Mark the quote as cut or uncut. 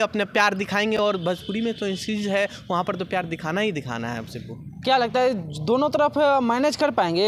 uncut